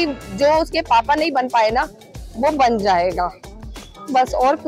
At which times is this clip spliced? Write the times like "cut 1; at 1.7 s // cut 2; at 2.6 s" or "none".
none

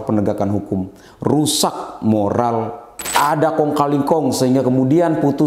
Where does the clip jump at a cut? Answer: cut 1; at 3.1 s

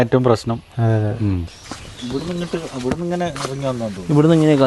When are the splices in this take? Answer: cut 1; at 1.5 s

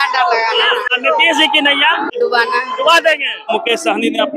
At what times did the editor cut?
cut 1; at 0.9 s // cut 2; at 2.1 s // cut 3; at 3.5 s

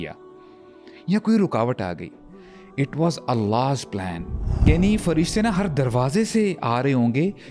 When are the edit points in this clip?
cut 1; at 4.7 s

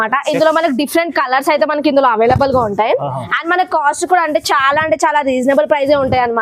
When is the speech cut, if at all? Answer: none

